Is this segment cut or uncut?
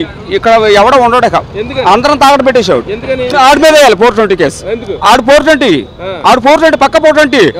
cut